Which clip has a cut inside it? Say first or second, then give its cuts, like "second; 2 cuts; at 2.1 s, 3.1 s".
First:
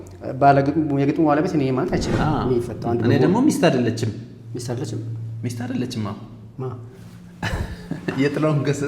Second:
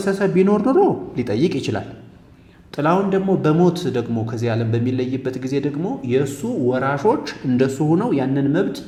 first; 1 cut; at 2.2 s